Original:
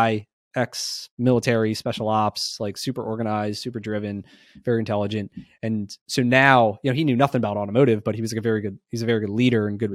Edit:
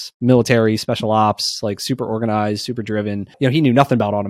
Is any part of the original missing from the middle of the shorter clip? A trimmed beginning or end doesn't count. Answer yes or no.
yes